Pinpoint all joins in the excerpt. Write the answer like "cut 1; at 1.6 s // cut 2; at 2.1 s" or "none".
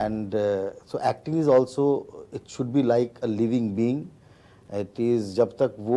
none